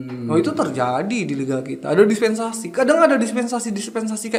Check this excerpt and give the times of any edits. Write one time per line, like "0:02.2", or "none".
none